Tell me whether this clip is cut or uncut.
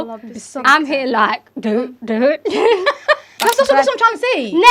cut